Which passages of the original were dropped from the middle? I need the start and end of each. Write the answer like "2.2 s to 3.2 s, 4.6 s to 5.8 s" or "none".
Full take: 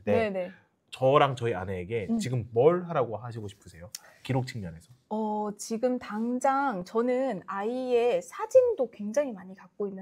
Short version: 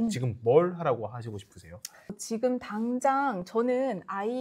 4.2 s to 5.5 s